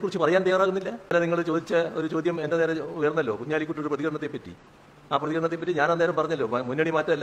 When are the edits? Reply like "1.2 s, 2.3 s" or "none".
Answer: 1.1 s